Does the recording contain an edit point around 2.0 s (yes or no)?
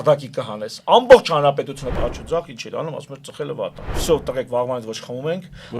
yes